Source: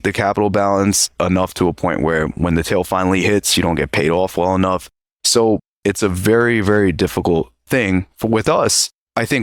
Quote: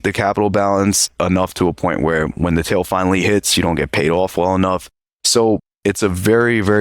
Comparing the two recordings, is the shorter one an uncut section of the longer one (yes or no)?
yes